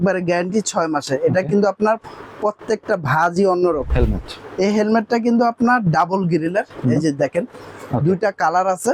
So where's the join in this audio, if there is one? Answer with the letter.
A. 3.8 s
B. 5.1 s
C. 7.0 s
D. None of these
A